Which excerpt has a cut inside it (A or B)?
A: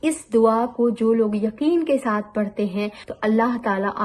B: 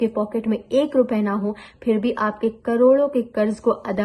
A